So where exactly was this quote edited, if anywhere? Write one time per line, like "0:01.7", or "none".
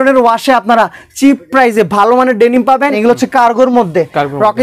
0:03.0